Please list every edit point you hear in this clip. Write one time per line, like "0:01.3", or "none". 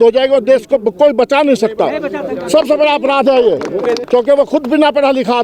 0:04.0